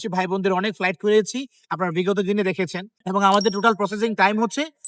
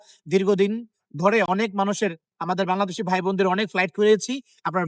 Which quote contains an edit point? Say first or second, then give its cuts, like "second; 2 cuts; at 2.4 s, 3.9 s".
first; 1 cut; at 2.9 s